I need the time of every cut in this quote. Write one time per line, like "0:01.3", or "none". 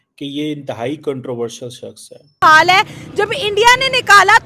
0:02.4